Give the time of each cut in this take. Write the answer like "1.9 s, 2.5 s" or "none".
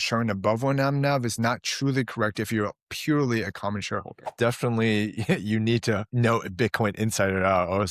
4.3 s, 6.1 s